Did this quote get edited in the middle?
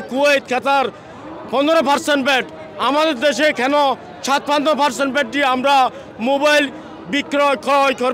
no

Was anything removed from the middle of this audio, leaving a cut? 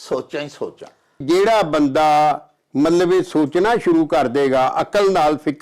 yes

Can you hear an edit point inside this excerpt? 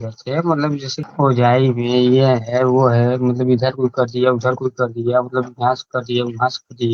yes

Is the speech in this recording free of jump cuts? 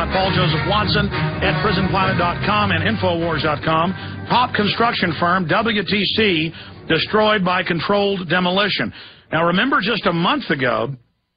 no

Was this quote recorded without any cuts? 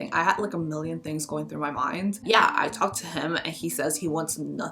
no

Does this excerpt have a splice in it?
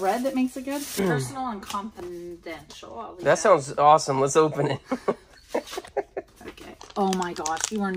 yes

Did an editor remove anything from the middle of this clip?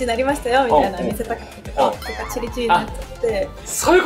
no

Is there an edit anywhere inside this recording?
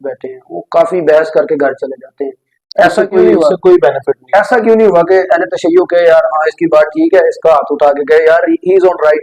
no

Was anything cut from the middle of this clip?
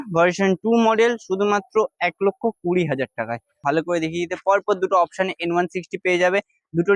yes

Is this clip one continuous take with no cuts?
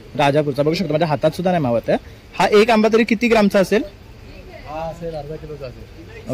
yes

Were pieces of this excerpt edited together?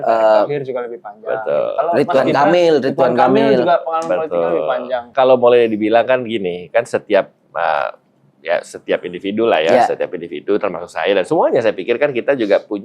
yes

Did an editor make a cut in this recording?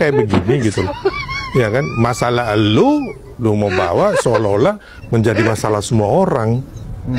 no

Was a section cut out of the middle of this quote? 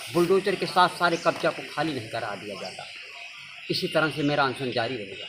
no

